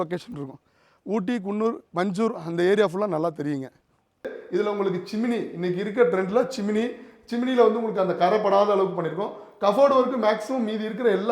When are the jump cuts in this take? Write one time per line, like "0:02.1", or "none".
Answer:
0:04.4